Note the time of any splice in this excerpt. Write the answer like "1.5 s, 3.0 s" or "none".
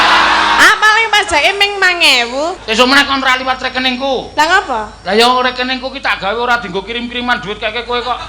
2.6 s